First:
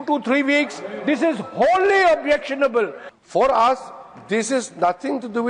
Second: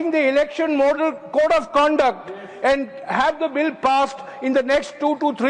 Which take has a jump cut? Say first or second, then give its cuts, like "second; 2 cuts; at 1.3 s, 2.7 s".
first; 1 cut; at 3.0 s